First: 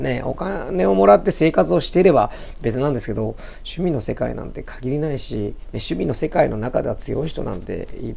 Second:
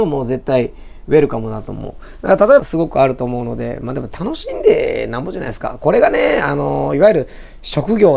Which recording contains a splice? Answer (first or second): second